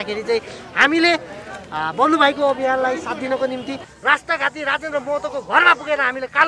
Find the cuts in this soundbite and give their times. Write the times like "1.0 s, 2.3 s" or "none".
3.8 s